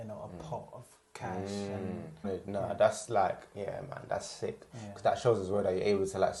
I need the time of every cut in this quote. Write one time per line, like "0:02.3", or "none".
0:02.2